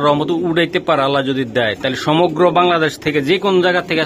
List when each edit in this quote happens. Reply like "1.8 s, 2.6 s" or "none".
none